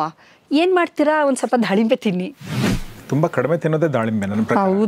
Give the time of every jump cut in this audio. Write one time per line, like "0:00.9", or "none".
0:02.8